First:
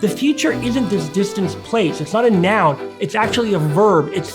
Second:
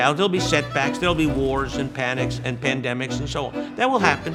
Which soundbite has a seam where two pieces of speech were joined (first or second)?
first